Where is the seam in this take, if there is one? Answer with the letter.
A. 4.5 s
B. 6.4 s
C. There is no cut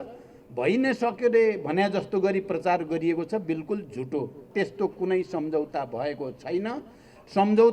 A